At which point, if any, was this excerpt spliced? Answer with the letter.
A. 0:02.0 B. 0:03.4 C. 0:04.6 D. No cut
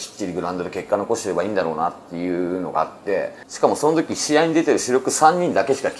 B